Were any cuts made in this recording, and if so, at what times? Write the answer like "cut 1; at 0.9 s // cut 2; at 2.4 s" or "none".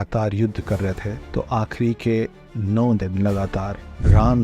cut 1; at 1.1 s